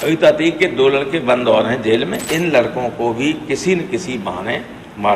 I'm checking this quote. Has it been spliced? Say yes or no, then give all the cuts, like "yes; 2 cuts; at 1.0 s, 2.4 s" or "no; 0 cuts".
yes; 1 cut; at 2.3 s